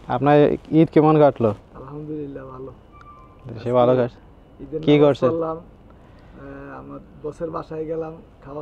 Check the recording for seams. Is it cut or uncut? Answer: uncut